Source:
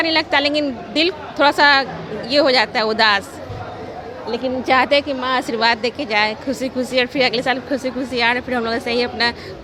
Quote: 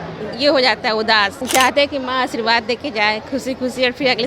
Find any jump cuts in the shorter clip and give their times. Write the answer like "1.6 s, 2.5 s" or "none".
1.4 s